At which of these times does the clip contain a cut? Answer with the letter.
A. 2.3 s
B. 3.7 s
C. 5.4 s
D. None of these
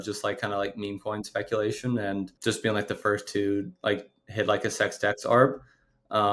A